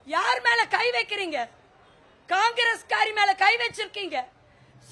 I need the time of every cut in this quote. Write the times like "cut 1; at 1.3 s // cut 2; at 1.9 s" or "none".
none